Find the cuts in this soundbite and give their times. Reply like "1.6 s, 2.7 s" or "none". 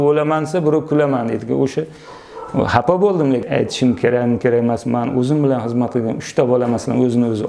3.4 s